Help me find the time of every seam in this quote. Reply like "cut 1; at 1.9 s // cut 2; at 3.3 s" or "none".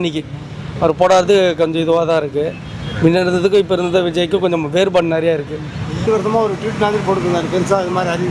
cut 1; at 6.0 s